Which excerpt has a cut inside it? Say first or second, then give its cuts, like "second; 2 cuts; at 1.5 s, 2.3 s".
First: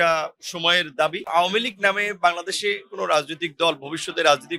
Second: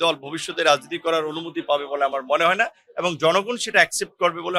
first; 1 cut; at 1.3 s